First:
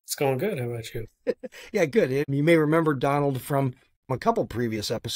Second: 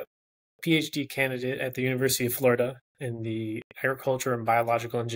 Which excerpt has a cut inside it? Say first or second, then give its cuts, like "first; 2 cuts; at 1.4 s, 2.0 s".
first; 2 cuts; at 2.2 s, 4.1 s